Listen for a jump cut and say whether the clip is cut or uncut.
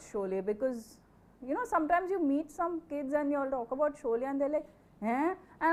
uncut